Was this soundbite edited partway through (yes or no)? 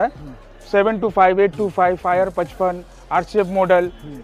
no